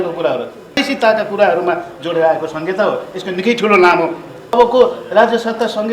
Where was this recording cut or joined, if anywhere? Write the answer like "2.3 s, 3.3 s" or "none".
0.8 s, 4.6 s